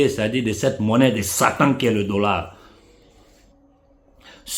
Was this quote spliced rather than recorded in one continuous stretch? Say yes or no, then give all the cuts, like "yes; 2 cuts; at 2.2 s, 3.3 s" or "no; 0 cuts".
yes; 1 cut; at 3.1 s